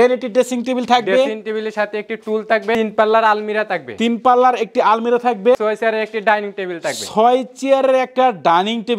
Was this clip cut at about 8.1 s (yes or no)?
no